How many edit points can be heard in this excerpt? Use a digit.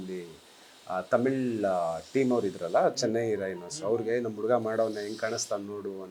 0